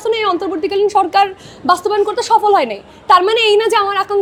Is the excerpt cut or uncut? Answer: uncut